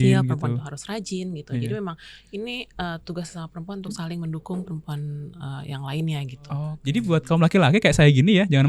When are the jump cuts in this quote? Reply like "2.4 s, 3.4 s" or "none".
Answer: 6.7 s